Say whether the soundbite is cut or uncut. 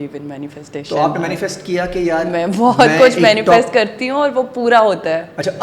uncut